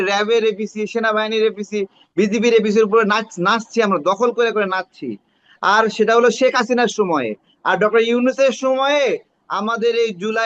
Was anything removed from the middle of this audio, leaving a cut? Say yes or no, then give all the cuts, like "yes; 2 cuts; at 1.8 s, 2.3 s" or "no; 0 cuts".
no; 0 cuts